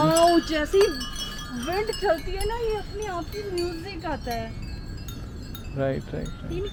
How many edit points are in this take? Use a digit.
0